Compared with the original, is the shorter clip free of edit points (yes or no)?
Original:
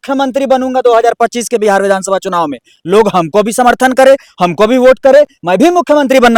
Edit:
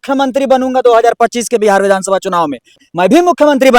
no